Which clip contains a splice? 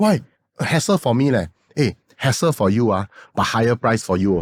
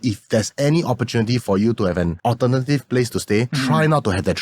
second; 2 cuts; at 2.1 s, 3.5 s

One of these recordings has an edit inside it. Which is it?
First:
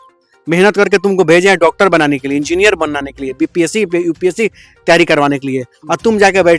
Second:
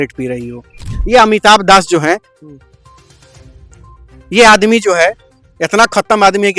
second; 1 cut; at 0.9 s

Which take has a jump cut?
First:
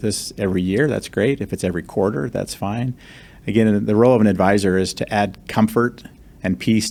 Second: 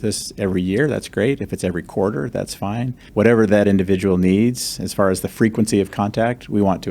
second; 1 cut; at 3.0 s

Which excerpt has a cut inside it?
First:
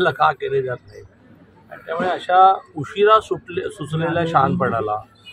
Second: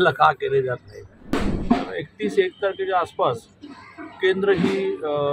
second; 1 cut; at 1.3 s

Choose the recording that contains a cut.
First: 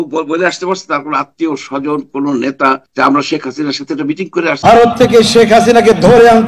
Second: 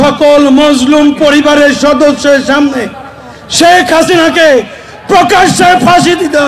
first; 2 cuts; at 2.9 s, 4.6 s

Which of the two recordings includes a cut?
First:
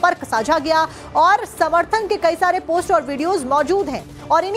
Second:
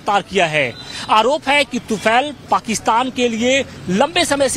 second; 1 cut; at 2.1 s

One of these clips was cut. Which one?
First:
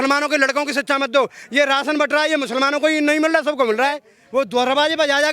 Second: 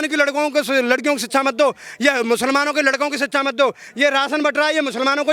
first; 1 cut; at 4.1 s

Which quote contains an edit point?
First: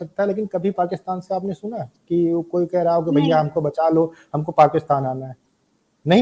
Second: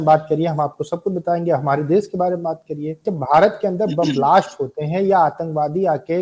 second; 1 cut; at 3.1 s

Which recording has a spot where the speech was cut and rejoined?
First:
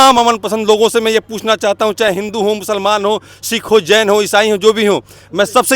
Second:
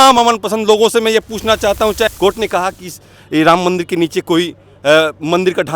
second; 1 cut; at 2.1 s

